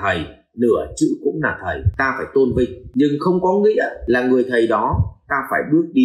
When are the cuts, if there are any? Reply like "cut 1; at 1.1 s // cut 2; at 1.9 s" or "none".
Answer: cut 1; at 1.9 s // cut 2; at 2.8 s // cut 3; at 4.0 s